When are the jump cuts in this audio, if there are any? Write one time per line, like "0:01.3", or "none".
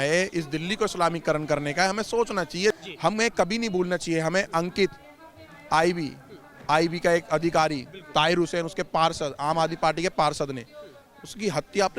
0:02.8